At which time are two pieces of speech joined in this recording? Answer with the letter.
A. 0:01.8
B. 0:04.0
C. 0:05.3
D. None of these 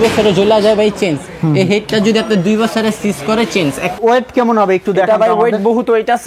B